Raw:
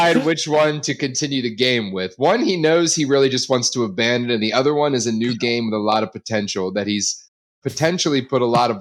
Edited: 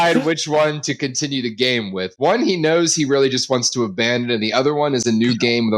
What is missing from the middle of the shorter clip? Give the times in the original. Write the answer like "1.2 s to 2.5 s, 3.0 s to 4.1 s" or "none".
none